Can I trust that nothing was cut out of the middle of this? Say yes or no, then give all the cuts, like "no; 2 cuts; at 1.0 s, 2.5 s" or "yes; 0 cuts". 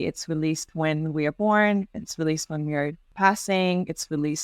no; 1 cut; at 3.0 s